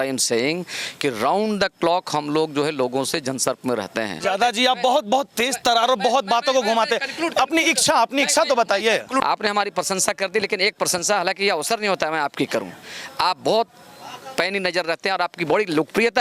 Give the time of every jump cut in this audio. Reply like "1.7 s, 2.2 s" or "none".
4.2 s, 9.2 s